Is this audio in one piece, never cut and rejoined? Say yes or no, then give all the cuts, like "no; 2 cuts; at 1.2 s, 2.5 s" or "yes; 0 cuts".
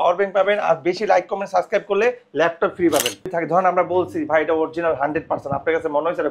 no; 1 cut; at 3.3 s